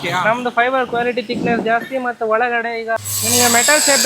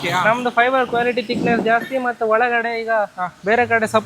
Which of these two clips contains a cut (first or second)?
first